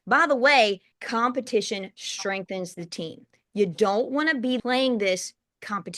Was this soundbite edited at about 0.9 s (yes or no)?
yes